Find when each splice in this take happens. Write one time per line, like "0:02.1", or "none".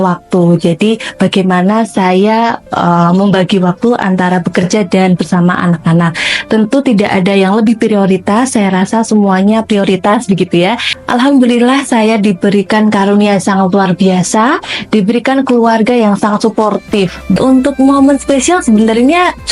0:10.9
0:17.4